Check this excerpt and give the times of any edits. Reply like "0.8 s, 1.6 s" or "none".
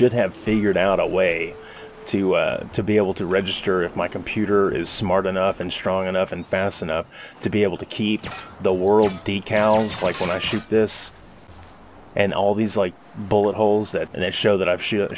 14.1 s